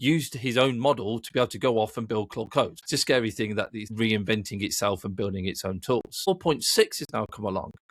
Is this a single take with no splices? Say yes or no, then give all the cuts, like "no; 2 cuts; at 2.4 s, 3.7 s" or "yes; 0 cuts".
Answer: no; 3 cuts; at 2.8 s, 3.8 s, 6.3 s